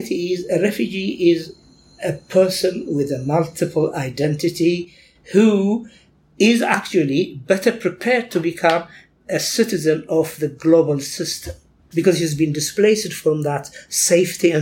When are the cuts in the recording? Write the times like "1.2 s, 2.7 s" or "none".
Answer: none